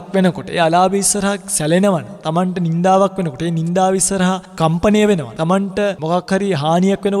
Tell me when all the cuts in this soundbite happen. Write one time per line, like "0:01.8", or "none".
0:02.1
0:05.4